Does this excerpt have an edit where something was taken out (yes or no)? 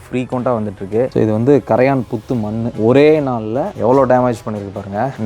yes